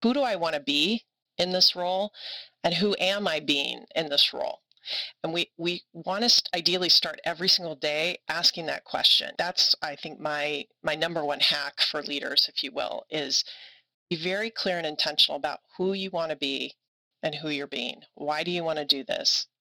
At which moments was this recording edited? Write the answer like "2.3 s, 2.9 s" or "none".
none